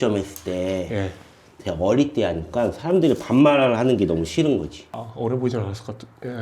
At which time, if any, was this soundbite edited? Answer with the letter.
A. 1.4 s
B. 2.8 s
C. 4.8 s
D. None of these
C